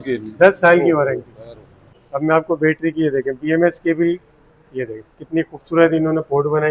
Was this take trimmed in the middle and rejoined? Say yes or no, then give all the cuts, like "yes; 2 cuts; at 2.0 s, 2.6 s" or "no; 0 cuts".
yes; 1 cut; at 1.9 s